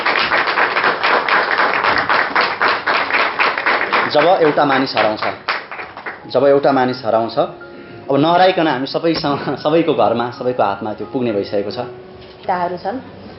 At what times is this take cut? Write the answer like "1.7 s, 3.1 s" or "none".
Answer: 12.4 s